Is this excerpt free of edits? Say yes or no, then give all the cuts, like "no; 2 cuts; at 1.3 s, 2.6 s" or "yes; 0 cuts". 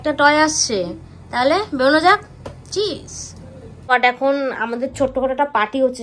no; 1 cut; at 3.9 s